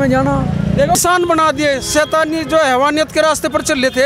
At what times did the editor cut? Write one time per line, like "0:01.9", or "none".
0:01.0